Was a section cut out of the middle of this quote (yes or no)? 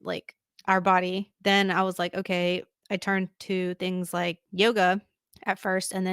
yes